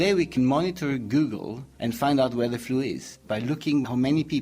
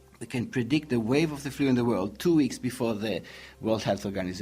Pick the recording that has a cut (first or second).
first